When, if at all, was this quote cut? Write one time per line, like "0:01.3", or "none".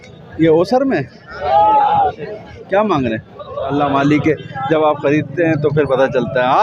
0:03.7